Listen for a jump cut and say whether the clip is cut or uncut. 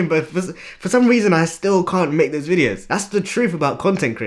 cut